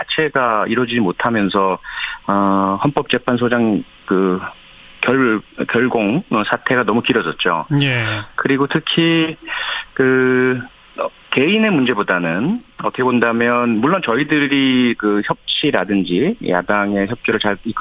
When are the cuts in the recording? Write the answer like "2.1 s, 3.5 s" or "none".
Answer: 9.4 s